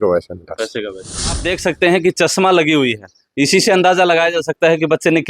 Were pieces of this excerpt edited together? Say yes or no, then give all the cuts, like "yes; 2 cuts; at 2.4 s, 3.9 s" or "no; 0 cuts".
yes; 1 cut; at 1.4 s